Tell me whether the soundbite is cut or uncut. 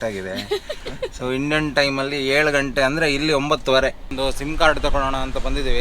cut